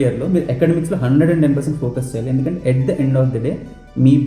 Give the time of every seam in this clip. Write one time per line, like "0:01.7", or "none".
none